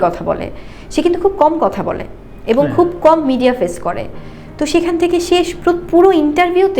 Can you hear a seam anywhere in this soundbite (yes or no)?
no